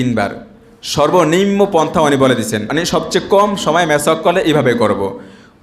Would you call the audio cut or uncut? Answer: cut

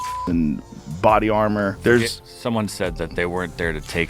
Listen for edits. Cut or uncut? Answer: cut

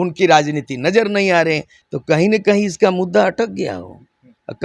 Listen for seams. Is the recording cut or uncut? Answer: cut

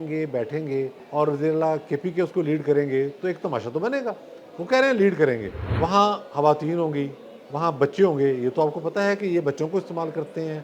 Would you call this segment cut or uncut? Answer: cut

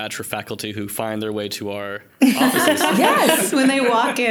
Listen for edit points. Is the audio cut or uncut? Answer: uncut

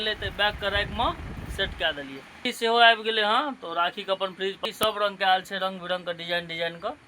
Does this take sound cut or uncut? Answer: cut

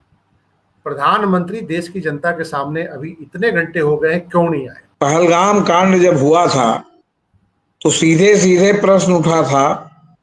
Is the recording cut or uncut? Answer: cut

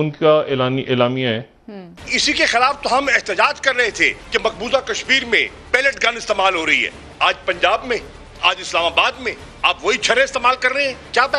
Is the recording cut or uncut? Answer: cut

